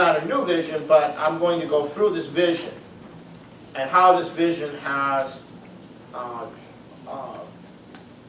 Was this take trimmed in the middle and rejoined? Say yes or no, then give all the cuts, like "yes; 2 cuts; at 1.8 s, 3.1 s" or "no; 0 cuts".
no; 0 cuts